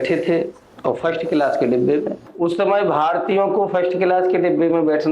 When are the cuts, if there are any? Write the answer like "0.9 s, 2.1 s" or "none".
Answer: 2.2 s